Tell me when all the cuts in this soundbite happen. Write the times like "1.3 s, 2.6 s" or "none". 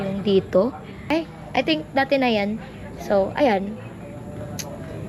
0.9 s